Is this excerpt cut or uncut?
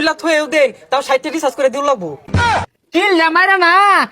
cut